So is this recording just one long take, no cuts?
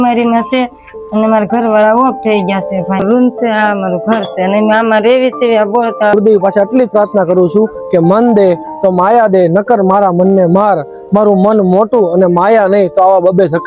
no; 2 cuts; at 3.0 s, 6.1 s

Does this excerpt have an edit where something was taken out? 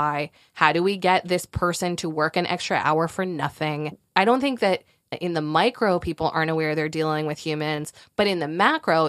yes; 2 cuts; at 3.9 s, 5.1 s

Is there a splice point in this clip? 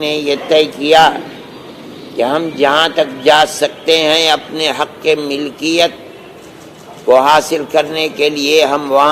no; 0 cuts

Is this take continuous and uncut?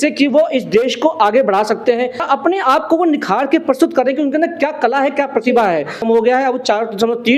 no; 2 cuts; at 2.2 s, 6.0 s

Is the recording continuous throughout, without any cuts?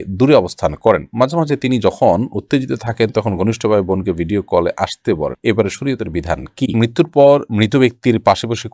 no; 1 cut; at 6.8 s

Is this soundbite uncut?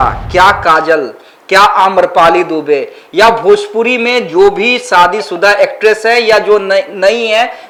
yes; 0 cuts

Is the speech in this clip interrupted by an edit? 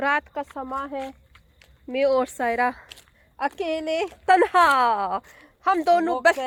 no; 0 cuts

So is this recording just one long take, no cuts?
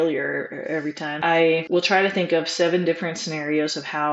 no; 1 cut; at 1.2 s

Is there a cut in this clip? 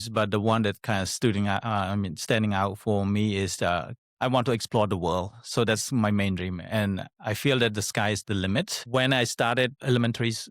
yes; 2 cuts; at 8.8 s, 9.8 s

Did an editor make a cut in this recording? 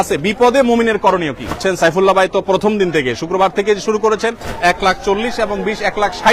yes; 2 cuts; at 1.6 s, 4.5 s

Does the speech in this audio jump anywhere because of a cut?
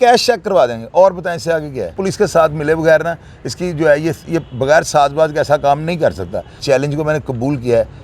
yes; 2 cuts; at 2.0 s, 6.6 s

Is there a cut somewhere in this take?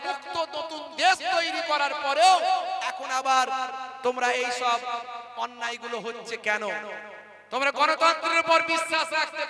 no; 0 cuts

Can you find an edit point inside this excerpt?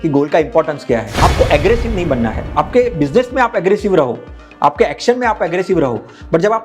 yes; 1 cut; at 1.1 s

